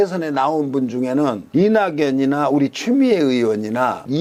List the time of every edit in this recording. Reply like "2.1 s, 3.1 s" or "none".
none

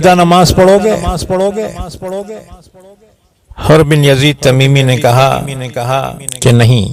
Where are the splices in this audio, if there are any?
none

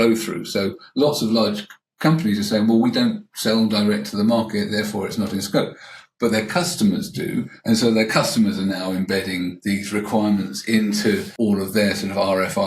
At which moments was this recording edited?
11.3 s

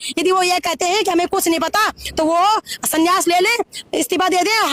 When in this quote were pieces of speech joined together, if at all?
none

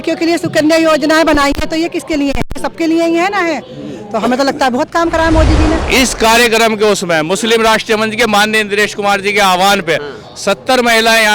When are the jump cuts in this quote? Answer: 5.8 s

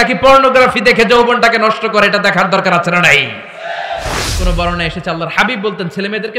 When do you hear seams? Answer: 4.3 s

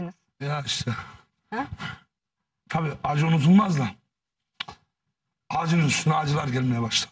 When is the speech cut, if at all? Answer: 2.5 s

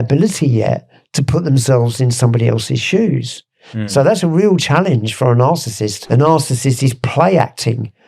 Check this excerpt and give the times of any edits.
5.9 s

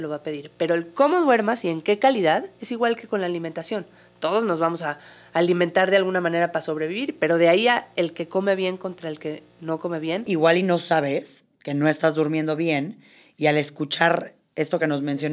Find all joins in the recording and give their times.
10.2 s

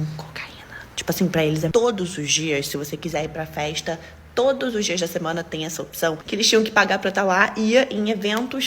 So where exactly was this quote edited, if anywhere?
1.7 s, 6.2 s

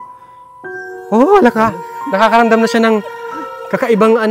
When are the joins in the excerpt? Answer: none

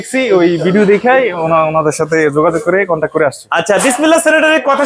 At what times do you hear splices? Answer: none

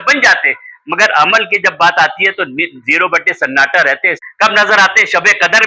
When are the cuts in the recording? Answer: 4.2 s

